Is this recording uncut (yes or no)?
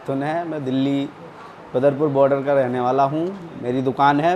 yes